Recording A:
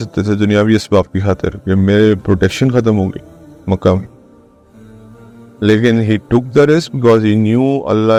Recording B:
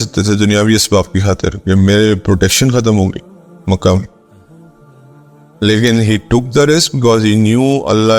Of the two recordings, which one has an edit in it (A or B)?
B